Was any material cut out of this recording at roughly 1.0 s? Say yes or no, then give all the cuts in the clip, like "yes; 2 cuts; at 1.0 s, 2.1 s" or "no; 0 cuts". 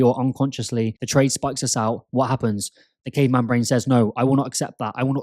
yes; 1 cut; at 1.0 s